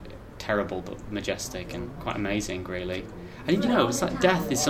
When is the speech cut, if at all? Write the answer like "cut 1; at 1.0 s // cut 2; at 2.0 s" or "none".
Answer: cut 1; at 1.9 s